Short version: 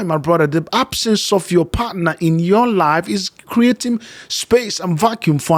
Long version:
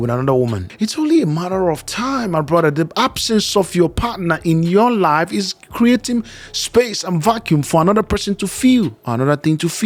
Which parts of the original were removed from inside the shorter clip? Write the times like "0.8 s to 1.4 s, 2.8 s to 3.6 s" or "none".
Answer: none